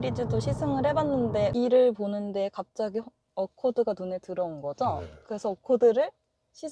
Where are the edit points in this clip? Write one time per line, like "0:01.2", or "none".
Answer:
0:01.5